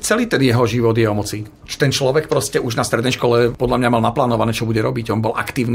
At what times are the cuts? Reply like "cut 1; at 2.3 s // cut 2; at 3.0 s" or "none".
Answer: none